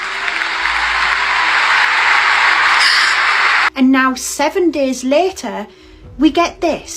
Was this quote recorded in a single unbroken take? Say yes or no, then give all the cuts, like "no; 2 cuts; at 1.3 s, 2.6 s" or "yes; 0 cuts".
no; 1 cut; at 3.7 s